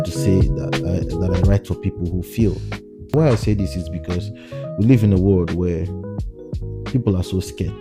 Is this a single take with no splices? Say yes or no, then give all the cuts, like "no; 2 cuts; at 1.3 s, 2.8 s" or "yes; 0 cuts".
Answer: no; 1 cut; at 3.1 s